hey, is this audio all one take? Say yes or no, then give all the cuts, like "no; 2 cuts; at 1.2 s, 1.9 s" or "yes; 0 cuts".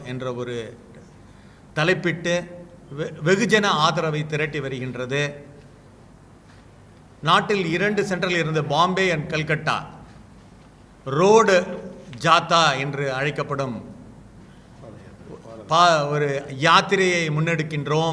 yes; 0 cuts